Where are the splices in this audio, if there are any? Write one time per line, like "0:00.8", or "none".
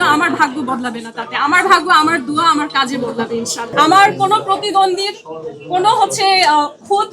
0:03.7